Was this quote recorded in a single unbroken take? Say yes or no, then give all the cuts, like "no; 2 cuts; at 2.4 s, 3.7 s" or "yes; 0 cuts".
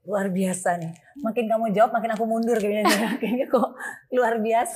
yes; 0 cuts